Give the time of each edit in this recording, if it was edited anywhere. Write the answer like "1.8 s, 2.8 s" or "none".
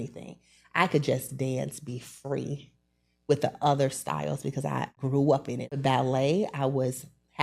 5.0 s, 5.7 s